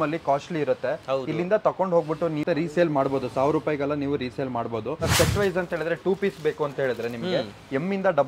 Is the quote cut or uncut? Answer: cut